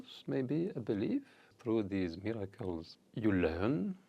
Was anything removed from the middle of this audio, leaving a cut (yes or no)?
yes